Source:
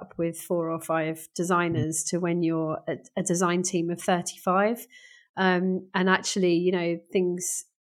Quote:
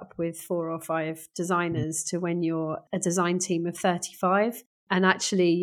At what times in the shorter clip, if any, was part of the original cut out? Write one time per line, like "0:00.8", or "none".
0:02.8
0:04.8